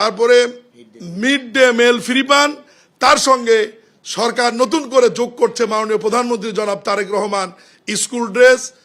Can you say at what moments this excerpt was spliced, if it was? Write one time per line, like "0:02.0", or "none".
none